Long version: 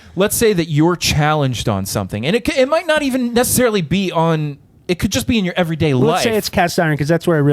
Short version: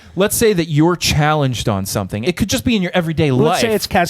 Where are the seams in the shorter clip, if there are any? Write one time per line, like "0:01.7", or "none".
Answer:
0:02.1